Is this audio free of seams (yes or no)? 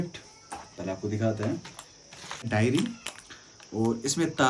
no